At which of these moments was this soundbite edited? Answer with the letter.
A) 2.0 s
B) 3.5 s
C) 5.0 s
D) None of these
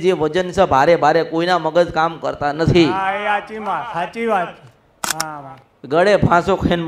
C